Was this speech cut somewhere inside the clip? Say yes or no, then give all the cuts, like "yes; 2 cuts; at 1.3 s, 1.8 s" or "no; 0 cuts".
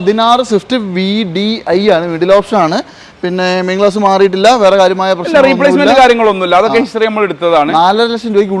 no; 0 cuts